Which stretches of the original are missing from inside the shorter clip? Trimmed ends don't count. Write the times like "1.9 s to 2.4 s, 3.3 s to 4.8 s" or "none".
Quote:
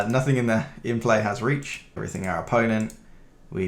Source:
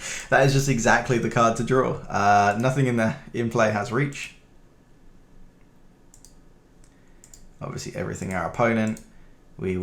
4.5 s to 8.1 s